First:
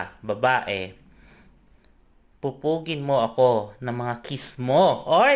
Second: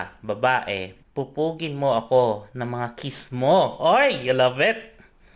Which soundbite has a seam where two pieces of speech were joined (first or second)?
second